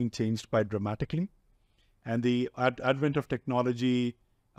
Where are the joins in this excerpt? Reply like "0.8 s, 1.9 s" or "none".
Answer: none